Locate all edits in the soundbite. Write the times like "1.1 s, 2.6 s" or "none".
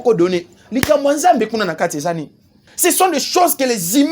2.7 s